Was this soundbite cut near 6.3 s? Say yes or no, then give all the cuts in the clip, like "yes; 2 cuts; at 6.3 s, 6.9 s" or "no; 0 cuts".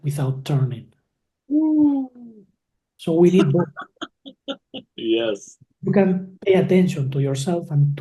yes; 1 cut; at 6.3 s